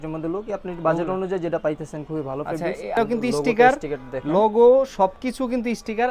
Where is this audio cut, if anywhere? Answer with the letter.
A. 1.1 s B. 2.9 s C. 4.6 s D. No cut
B